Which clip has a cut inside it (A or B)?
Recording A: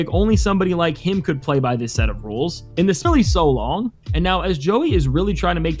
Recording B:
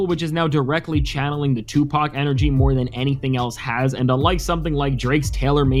A